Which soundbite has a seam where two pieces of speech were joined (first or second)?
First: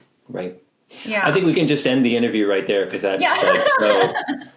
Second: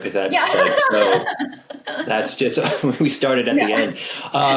first